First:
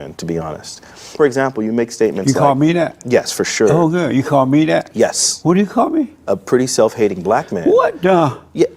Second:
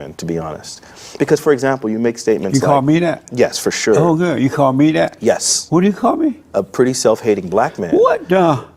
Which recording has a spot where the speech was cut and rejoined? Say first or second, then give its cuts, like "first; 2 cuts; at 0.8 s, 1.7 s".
first; 1 cut; at 1.1 s